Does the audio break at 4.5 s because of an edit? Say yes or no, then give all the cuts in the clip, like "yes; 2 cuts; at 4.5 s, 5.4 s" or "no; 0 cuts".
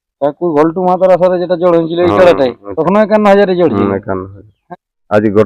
yes; 2 cuts; at 2.7 s, 4.5 s